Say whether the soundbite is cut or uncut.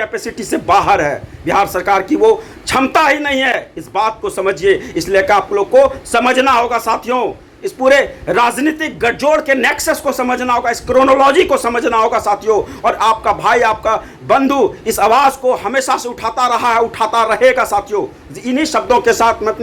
uncut